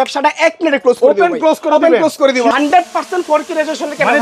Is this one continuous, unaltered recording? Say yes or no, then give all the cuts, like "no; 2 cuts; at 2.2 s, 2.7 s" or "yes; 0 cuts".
no; 1 cut; at 2.5 s